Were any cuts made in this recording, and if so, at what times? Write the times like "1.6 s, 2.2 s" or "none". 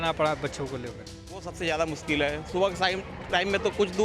1.5 s